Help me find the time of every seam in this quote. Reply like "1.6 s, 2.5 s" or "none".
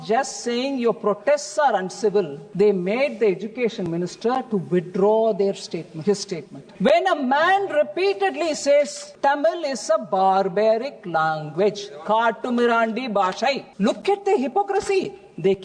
2.4 s, 6.6 s, 9.0 s, 13.7 s